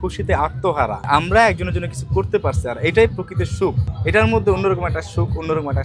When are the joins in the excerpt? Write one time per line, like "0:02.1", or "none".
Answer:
0:01.0
0:03.9